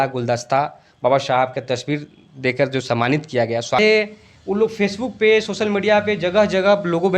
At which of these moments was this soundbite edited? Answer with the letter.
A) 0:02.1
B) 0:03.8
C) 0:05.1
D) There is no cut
B